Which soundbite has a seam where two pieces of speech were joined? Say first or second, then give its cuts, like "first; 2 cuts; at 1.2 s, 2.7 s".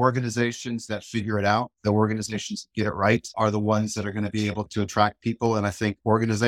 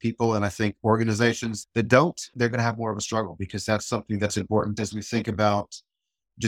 second; 1 cut; at 4.7 s